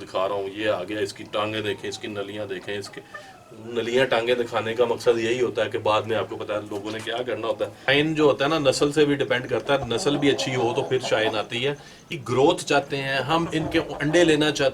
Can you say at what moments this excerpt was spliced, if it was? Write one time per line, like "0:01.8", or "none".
0:07.9
0:12.1